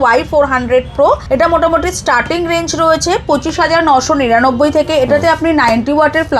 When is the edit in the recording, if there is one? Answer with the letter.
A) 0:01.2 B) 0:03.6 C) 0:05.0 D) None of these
A